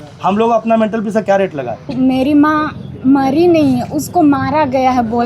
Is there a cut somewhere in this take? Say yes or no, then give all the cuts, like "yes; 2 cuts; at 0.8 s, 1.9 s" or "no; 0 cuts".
yes; 1 cut; at 1.9 s